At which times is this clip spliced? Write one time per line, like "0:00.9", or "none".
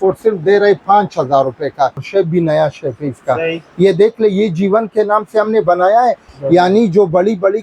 0:02.1
0:06.3